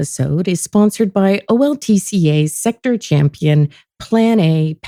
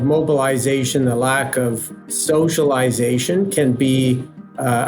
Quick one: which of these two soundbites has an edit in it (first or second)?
second